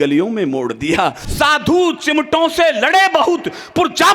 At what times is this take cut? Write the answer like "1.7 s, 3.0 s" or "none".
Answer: 1.2 s